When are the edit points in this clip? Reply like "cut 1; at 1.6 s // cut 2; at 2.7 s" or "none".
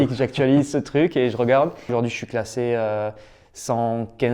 cut 1; at 1.9 s